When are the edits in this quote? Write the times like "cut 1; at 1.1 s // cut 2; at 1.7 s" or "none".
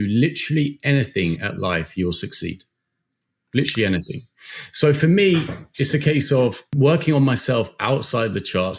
cut 1; at 6.7 s